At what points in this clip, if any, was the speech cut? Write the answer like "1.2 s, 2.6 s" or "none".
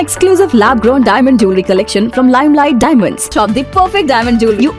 none